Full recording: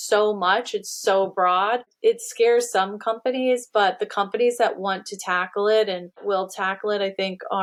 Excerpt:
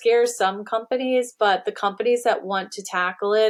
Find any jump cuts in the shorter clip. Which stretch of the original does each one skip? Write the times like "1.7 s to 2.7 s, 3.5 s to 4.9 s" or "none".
none

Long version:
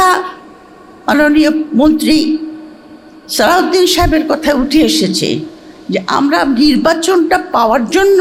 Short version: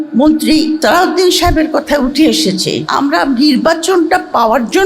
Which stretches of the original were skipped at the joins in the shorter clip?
2.4 s to 3.3 s, 5.4 s to 6.1 s

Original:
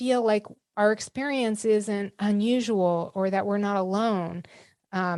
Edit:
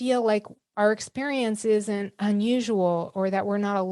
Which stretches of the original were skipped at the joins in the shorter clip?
none

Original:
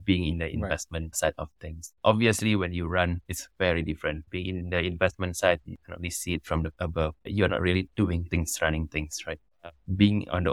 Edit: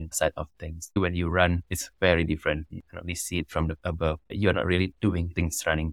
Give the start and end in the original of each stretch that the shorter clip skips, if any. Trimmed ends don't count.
2.0 s to 2.6 s, 4.3 s to 5.6 s

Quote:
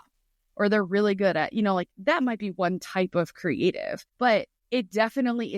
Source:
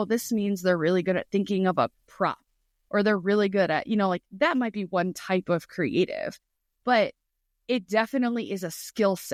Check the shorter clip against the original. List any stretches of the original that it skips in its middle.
6.4 s to 6.7 s, 7.2 s to 7.5 s

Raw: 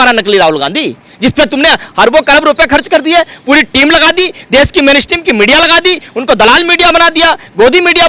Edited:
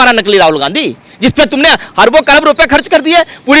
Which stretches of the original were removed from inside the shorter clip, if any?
none

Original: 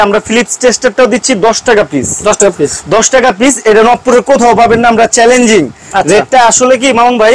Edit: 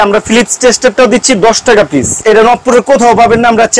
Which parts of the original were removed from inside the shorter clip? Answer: 2.2 s to 3.6 s

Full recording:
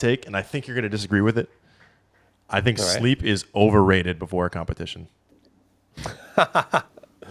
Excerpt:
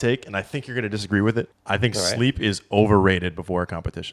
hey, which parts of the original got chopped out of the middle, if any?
1.6 s to 2.4 s

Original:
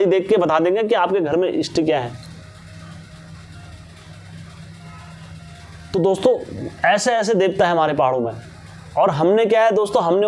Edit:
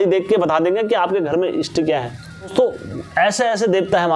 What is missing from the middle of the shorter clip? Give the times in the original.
2.5 s to 6.2 s

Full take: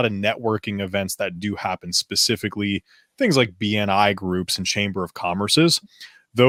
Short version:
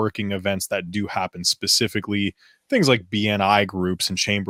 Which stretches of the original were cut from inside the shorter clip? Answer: none

